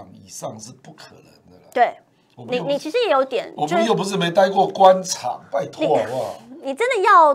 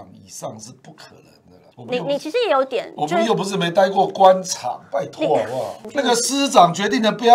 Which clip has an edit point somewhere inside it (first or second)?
second